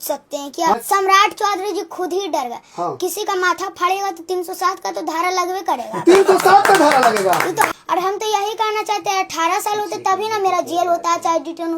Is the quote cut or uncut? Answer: cut